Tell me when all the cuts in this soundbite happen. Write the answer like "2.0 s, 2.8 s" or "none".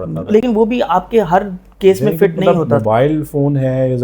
2.4 s